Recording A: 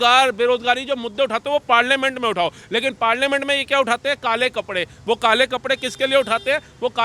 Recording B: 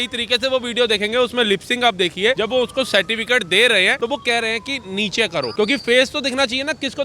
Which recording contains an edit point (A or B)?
B